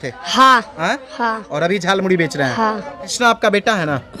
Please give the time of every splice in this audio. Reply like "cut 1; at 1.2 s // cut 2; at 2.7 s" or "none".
cut 1; at 3.0 s